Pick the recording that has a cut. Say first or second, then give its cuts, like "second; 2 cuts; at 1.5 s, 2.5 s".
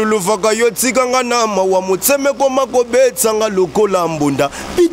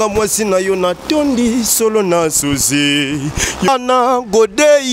second; 1 cut; at 3.7 s